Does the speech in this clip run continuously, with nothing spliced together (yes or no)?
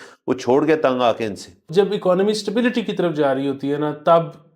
no